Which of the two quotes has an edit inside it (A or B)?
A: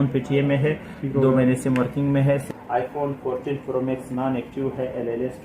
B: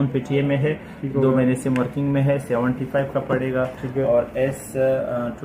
A